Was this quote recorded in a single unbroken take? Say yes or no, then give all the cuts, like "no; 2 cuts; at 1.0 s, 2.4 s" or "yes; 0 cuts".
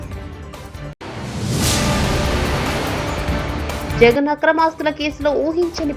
no; 1 cut; at 0.9 s